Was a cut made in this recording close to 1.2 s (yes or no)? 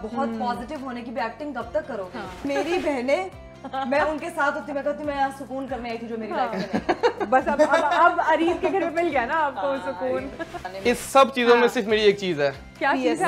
no